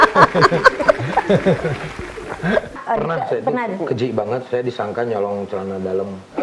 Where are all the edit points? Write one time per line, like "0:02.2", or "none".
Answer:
0:02.7